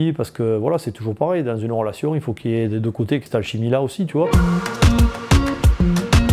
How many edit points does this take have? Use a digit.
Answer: 2